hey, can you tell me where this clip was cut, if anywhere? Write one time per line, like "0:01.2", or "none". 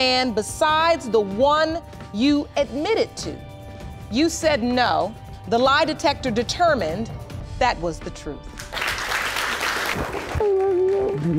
0:09.9

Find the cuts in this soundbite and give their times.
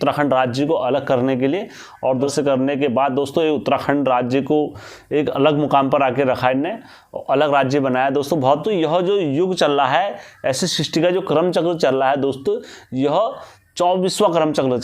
0:02.3
0:08.6

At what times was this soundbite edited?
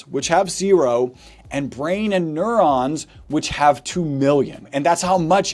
0:04.6

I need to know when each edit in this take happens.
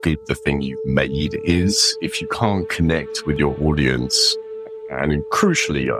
none

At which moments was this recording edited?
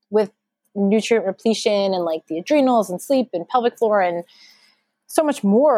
none

